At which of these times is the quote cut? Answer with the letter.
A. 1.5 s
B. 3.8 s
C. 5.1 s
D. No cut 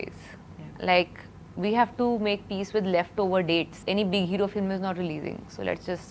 B